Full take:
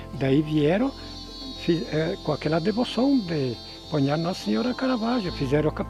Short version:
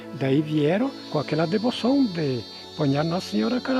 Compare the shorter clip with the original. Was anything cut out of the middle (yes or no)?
yes